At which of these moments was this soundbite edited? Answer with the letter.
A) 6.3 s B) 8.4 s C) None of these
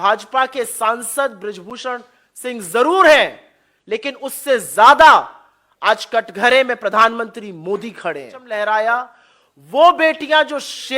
B